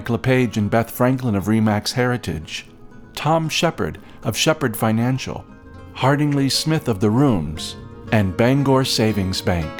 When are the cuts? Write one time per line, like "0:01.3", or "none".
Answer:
none